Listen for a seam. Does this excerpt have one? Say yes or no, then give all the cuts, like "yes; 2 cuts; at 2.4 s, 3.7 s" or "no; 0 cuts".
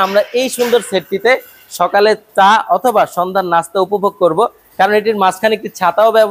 no; 0 cuts